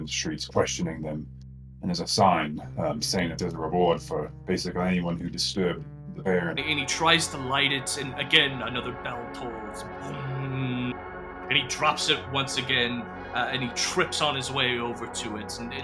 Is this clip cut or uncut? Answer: cut